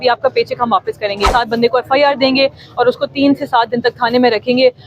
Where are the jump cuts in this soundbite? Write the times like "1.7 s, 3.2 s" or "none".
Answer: 1.3 s

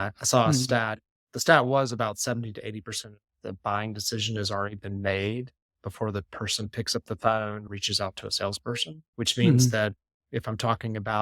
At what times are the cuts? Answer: 7.7 s, 9.0 s

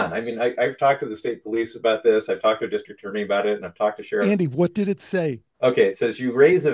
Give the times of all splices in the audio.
5.4 s

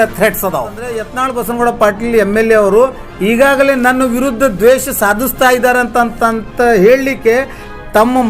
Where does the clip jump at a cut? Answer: 1.1 s

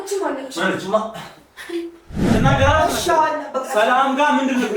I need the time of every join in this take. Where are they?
2.2 s

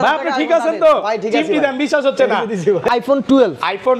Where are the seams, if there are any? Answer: 2.9 s

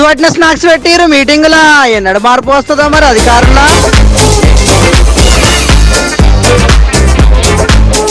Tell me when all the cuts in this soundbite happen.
none

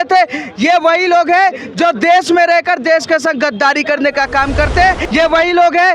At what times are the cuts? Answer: 5.0 s

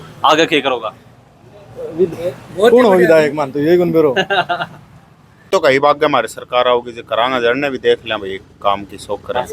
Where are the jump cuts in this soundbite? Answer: 5.5 s

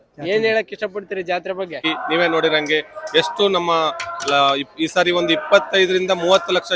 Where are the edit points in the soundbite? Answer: 1.8 s

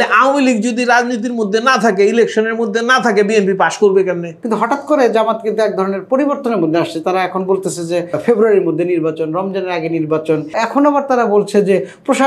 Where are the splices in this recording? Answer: 4.3 s, 8.2 s, 10.5 s

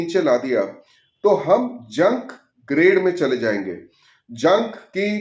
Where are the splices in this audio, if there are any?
none

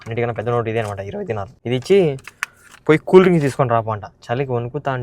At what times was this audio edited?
1.5 s

